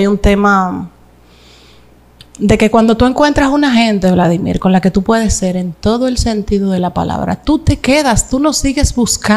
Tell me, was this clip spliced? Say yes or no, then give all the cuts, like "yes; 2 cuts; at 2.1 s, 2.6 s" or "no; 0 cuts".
no; 0 cuts